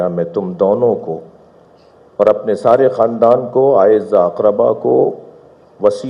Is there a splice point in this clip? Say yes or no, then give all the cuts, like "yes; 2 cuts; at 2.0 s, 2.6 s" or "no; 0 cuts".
no; 0 cuts